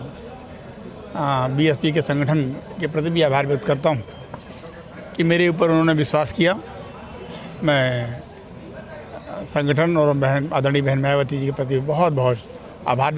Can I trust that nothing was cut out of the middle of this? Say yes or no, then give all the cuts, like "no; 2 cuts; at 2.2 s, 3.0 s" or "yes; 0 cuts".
yes; 0 cuts